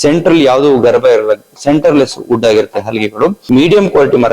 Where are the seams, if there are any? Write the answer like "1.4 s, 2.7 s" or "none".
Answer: 3.4 s